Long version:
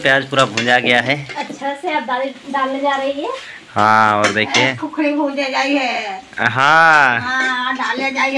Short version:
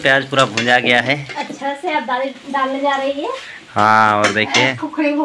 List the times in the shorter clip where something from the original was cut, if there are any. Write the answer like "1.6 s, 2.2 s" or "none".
none

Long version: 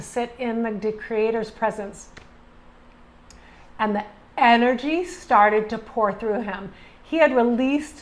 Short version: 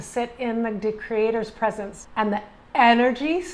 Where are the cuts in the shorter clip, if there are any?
1.9 s

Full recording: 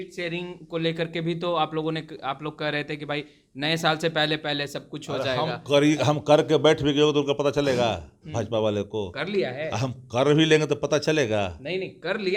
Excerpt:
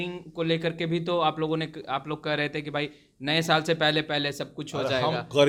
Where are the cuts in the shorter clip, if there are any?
none

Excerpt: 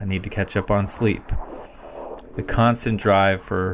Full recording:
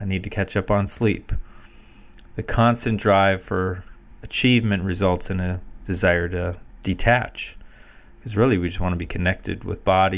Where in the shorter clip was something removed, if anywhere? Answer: none

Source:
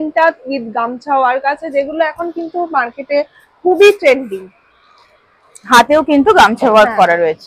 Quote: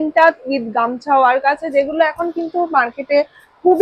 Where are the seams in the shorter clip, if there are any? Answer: none

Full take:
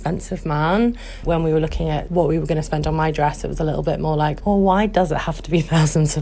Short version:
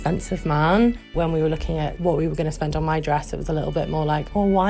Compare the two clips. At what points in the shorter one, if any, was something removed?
1.1 s

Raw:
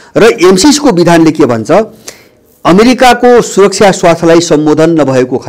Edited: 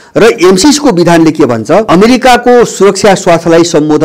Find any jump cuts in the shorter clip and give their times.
1.9 s

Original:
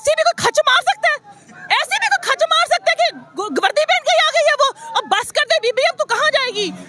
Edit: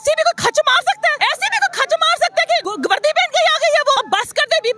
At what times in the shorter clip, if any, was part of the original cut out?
1.2 s, 2.7 s, 4.0 s

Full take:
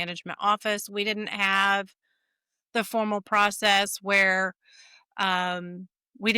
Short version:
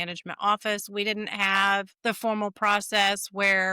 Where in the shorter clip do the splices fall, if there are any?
1.9 s

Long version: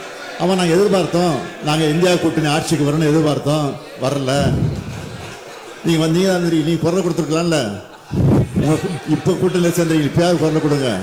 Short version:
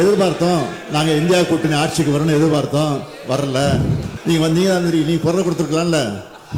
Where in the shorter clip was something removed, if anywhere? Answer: 4.1 s

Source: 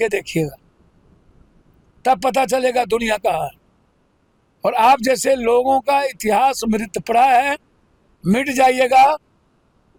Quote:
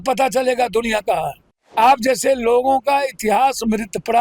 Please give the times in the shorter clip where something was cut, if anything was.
1.7 s

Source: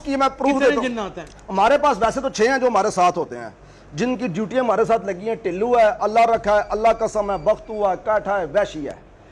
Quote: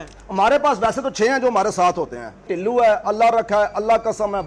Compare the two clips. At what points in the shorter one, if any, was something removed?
2.4 s

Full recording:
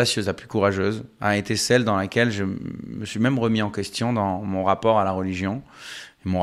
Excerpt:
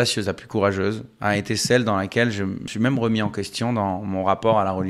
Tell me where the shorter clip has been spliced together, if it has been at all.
2.6 s

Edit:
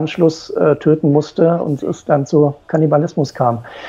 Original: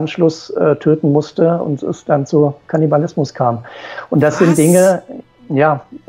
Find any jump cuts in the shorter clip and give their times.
none

